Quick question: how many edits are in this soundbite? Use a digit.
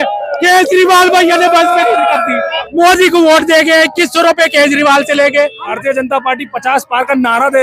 2